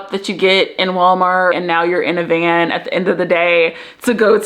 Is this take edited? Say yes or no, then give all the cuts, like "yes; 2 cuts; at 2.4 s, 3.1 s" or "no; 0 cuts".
yes; 1 cut; at 1.5 s